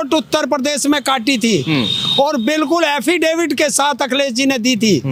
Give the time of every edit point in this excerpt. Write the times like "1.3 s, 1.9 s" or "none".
none